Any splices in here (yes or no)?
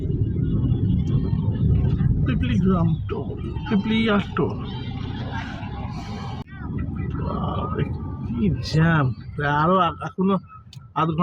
yes